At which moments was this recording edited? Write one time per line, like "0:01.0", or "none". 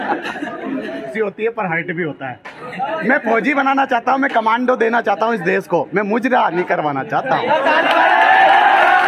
0:01.1